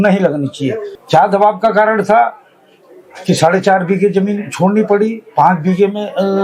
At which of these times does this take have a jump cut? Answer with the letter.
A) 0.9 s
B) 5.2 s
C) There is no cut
A